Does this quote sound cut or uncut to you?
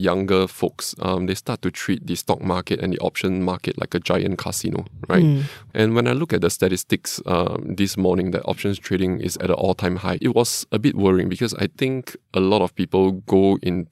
cut